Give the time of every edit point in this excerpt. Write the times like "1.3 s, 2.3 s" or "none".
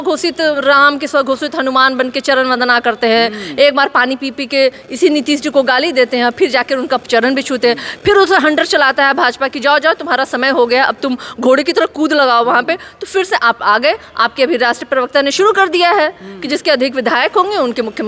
none

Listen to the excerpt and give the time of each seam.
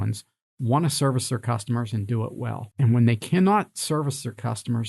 2.7 s

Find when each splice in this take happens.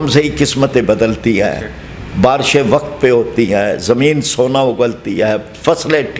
none

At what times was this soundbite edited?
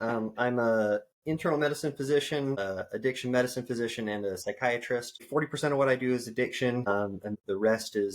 2.6 s, 5.2 s, 7.2 s

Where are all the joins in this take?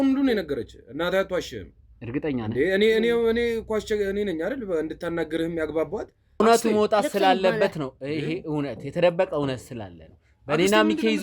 6.4 s

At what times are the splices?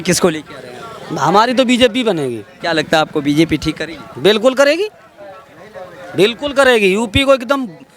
2.5 s

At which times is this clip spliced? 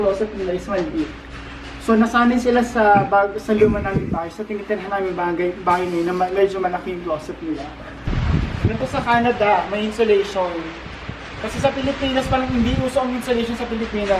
8.1 s

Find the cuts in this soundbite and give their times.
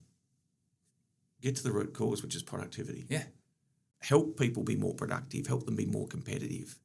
3.9 s

